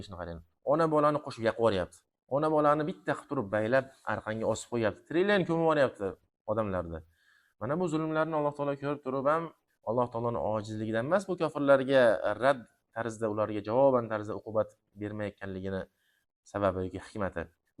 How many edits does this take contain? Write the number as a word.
zero